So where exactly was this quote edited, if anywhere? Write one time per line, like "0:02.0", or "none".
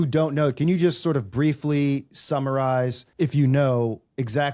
0:03.0